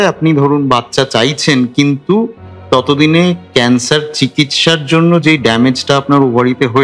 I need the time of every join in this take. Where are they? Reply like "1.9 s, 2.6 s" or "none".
none